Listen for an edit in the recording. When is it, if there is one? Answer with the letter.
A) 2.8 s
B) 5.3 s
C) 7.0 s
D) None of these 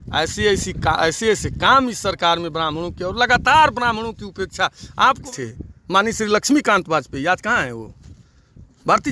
B